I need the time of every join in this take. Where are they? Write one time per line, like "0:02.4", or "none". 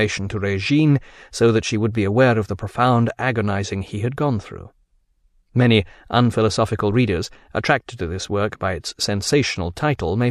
none